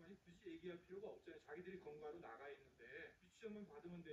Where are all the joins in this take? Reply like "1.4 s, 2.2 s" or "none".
3.2 s

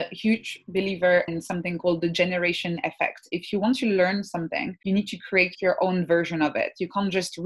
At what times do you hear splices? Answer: 1.3 s, 4.7 s

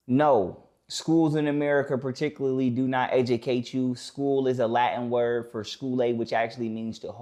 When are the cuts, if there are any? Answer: none

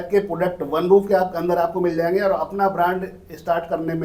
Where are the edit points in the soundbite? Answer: none

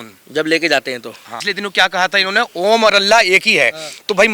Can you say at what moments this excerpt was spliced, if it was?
1.4 s

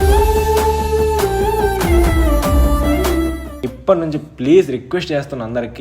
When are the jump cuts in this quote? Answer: 3.5 s

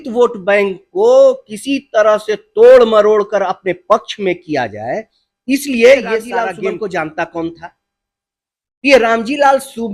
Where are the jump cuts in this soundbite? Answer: 6.4 s

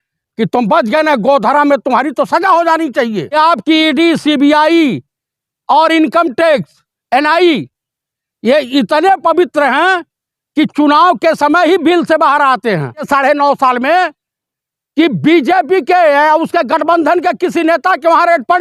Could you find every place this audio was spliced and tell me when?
3.3 s, 13.1 s

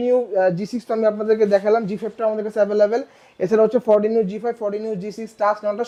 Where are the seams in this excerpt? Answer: none

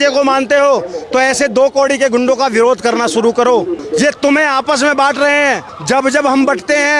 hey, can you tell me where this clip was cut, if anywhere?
3.8 s, 5.7 s

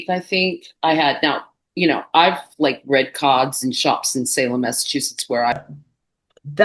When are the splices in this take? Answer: 5.6 s

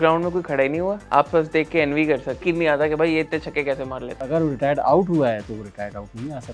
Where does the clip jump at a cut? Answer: 1.0 s, 2.4 s, 4.2 s

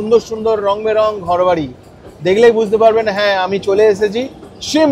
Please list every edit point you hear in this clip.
none

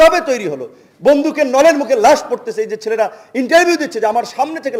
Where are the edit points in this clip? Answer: none

